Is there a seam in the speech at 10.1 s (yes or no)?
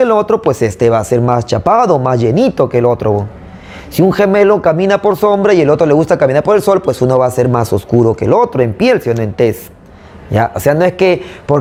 no